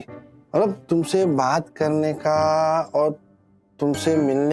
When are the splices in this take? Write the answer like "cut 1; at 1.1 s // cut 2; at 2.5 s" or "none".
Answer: none

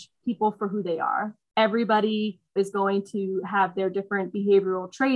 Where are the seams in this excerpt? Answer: cut 1; at 1.4 s // cut 2; at 2.5 s

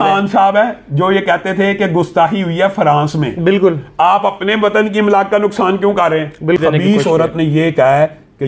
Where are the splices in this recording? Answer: cut 1; at 6.6 s

